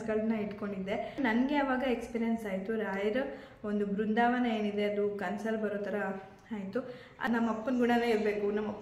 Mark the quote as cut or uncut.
cut